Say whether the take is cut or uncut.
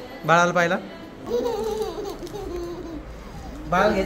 cut